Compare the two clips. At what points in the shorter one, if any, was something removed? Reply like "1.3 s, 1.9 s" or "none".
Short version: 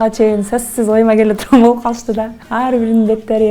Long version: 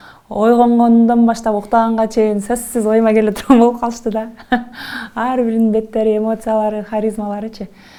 2.4 s